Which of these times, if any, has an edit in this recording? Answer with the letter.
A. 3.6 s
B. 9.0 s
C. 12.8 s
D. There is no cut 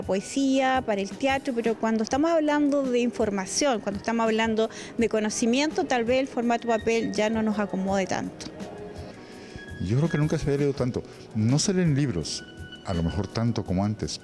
B